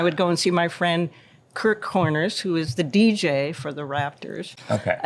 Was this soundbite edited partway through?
no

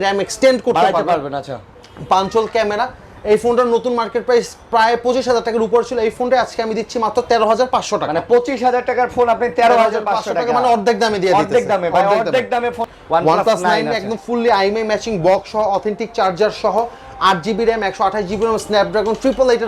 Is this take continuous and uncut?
no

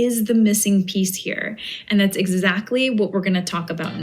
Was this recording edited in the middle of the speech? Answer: no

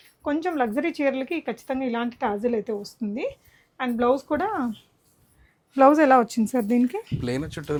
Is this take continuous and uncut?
yes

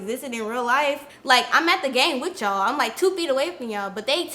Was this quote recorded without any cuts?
no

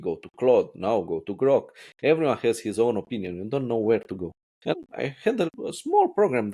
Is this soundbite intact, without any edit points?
no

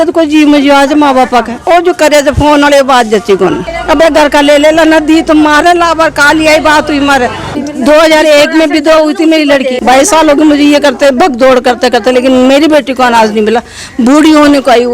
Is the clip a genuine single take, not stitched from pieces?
no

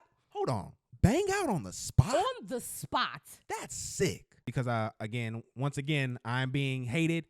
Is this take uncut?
no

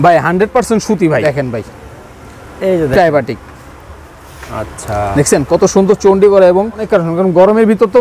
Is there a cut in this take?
yes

